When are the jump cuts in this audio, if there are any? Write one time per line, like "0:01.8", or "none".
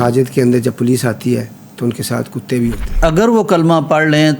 0:03.0